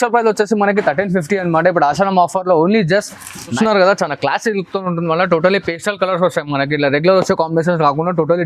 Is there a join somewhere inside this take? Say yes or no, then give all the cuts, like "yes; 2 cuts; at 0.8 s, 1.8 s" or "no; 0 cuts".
yes; 1 cut; at 3.5 s